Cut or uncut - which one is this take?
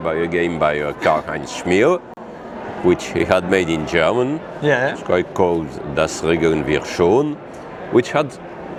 uncut